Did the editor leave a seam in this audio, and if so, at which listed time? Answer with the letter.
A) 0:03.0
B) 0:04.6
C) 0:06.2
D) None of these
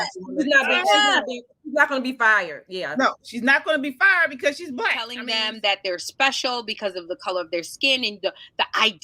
B